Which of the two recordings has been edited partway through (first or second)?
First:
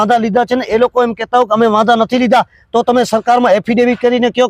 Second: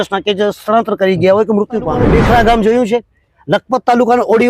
second